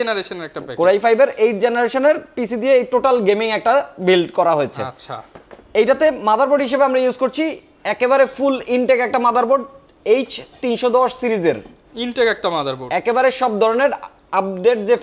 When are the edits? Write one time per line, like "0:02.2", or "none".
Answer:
none